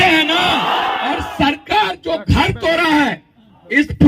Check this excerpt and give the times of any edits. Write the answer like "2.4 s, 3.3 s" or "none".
1.0 s

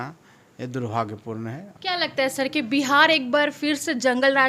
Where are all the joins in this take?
1.7 s

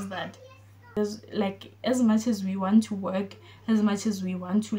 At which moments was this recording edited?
1.0 s

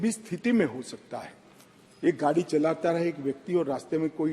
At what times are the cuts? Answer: none

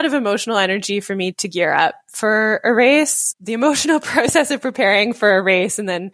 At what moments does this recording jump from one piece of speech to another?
3.2 s

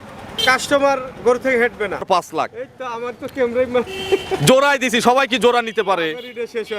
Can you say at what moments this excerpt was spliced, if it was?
2.0 s

